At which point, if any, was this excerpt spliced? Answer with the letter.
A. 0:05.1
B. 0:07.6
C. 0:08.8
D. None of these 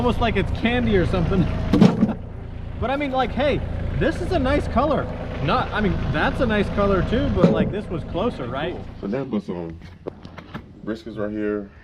C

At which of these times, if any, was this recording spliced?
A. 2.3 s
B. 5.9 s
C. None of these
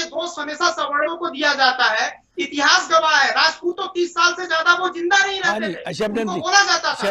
C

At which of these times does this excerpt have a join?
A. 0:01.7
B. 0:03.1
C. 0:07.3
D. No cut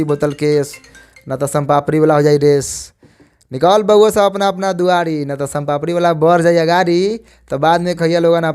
D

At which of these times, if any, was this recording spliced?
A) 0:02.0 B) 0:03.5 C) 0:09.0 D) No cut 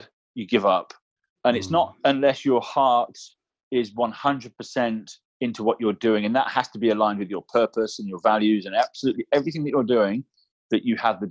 D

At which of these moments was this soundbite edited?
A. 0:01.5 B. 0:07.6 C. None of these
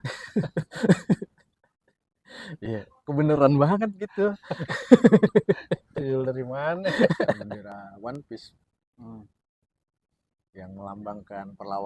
B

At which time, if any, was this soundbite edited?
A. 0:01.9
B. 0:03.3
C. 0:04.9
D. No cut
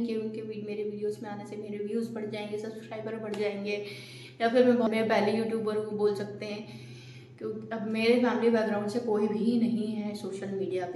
C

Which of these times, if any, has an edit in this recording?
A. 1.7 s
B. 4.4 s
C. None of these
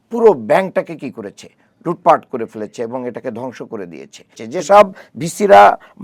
B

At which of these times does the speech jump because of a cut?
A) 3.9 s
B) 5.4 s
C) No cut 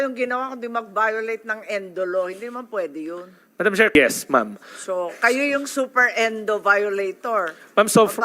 A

